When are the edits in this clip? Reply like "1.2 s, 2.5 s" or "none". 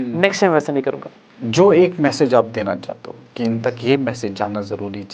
1.1 s